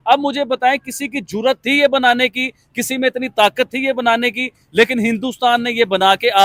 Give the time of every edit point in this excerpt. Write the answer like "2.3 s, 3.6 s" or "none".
none